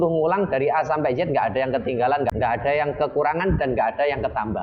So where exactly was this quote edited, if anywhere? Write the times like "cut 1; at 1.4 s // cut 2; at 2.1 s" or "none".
cut 1; at 2.3 s